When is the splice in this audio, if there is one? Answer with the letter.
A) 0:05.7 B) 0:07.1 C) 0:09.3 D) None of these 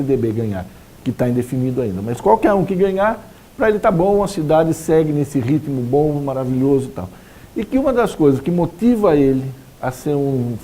C